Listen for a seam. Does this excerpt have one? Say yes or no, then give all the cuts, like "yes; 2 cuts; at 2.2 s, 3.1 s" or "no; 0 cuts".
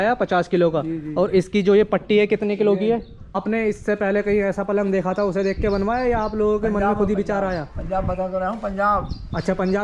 yes; 1 cut; at 3.4 s